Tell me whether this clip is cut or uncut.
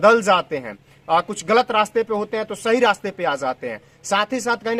uncut